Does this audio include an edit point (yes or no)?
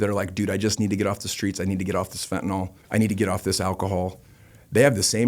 yes